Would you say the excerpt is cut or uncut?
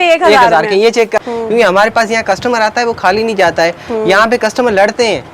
cut